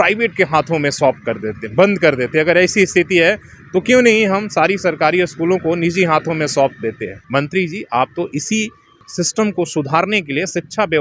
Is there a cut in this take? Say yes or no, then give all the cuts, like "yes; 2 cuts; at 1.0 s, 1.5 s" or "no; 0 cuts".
yes; 2 cuts; at 7.1 s, 9.0 s